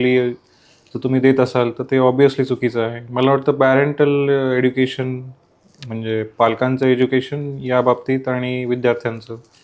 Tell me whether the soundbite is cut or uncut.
uncut